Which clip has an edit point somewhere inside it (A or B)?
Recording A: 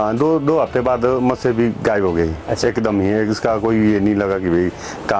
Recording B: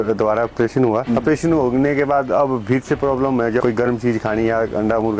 B